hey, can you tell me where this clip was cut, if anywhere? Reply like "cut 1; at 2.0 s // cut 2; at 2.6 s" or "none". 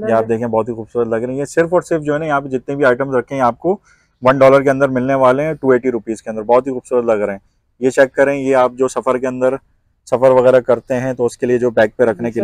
none